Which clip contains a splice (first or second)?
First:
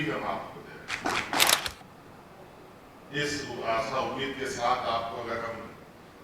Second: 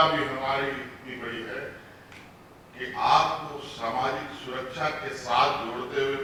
first